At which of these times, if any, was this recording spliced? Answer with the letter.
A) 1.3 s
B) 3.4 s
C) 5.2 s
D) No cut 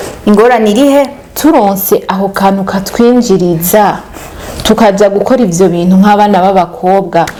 D